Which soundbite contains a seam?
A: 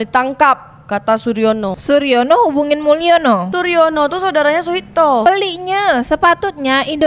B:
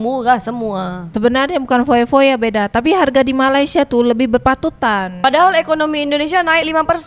A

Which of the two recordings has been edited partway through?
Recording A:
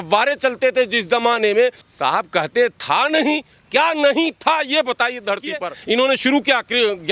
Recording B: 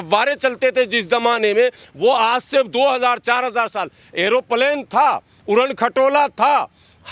A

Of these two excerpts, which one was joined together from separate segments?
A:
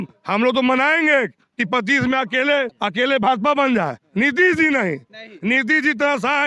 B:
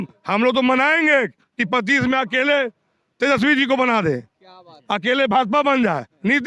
A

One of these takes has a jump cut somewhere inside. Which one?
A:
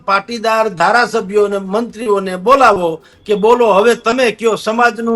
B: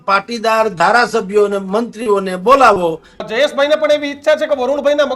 B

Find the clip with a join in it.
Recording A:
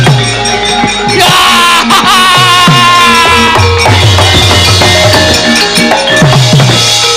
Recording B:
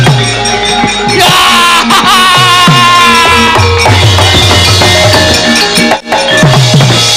A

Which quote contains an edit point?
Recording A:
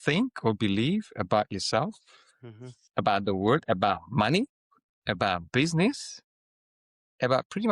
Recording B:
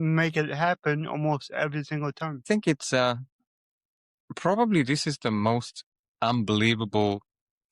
B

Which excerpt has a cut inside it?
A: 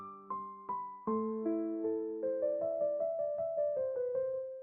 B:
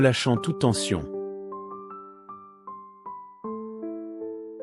B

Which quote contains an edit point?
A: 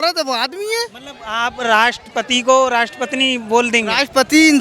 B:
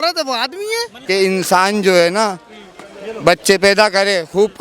B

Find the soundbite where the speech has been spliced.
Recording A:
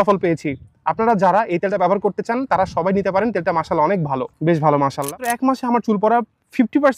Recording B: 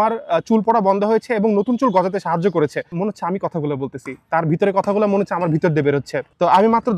A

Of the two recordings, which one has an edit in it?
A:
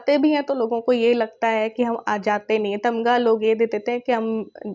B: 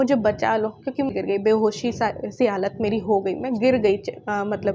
B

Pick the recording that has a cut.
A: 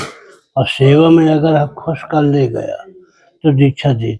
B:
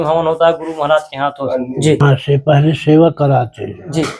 B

